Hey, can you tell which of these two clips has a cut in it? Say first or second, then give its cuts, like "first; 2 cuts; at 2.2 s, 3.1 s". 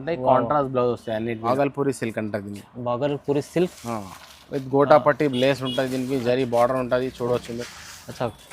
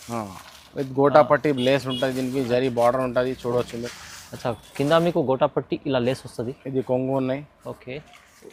first; 1 cut; at 1.5 s